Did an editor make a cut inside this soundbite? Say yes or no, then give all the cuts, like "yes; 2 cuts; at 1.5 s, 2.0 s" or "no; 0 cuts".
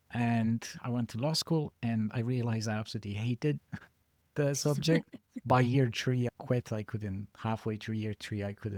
no; 0 cuts